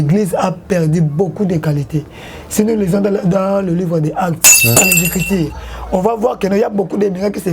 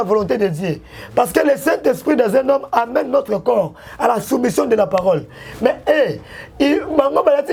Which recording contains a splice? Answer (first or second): first